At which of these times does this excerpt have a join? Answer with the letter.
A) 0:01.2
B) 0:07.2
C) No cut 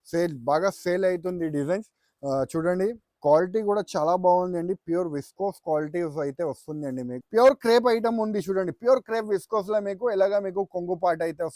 B